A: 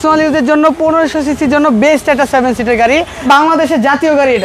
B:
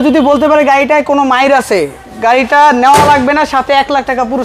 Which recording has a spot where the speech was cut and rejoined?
A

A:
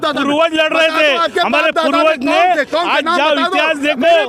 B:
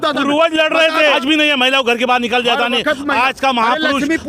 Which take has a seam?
B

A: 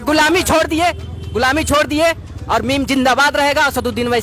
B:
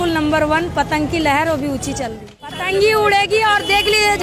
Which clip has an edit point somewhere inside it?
B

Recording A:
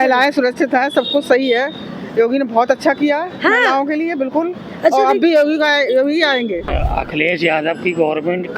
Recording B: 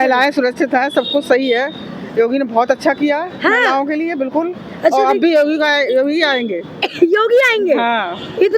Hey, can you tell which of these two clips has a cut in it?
A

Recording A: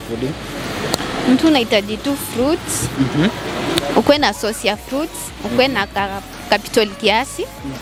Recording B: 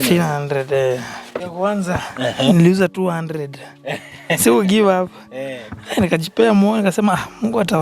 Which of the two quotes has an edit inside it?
B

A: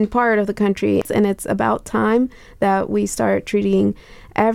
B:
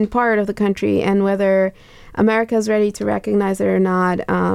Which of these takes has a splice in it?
A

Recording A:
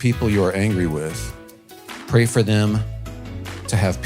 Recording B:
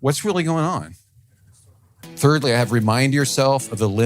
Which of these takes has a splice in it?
B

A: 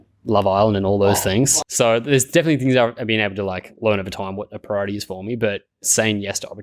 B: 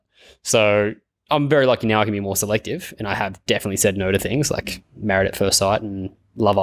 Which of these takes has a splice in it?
A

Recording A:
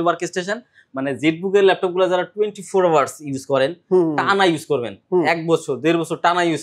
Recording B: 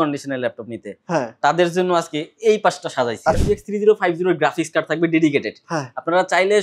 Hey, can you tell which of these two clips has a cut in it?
B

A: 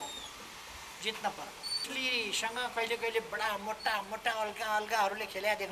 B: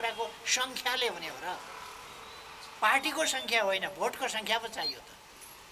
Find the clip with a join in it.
A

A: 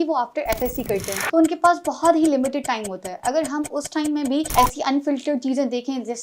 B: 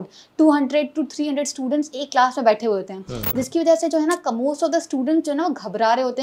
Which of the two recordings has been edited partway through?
A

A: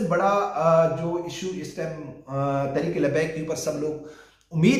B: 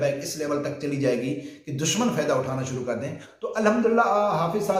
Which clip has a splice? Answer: B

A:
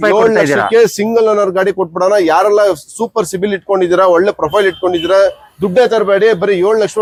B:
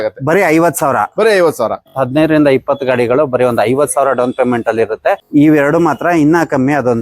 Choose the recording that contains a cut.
B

